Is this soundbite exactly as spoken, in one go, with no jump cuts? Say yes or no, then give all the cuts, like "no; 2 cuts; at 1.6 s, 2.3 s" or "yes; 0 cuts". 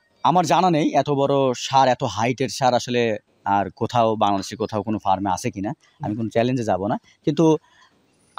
yes; 0 cuts